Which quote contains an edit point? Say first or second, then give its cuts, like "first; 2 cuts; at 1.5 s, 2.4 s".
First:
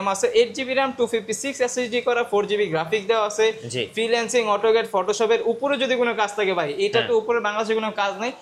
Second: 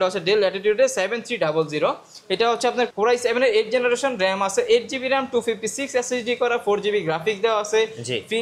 second; 1 cut; at 2.9 s